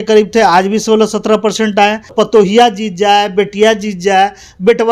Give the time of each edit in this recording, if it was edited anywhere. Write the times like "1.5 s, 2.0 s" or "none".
2.1 s

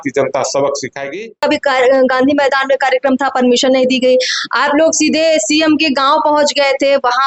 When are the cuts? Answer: 1.4 s

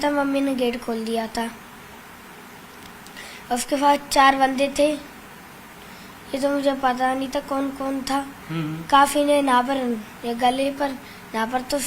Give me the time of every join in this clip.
none

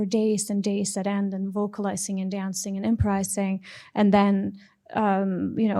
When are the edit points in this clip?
none

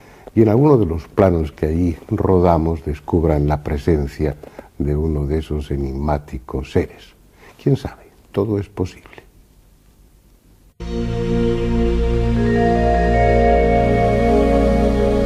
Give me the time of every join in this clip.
4.3 s

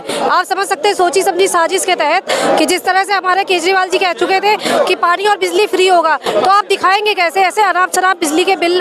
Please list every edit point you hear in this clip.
none

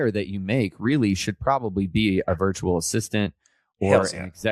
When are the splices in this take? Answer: none

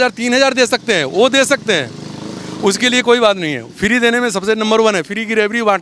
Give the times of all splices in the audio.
none

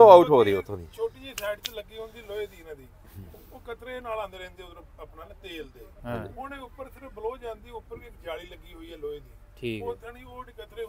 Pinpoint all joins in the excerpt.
none

